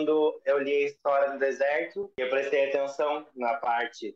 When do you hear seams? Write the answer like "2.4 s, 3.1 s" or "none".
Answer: 2.0 s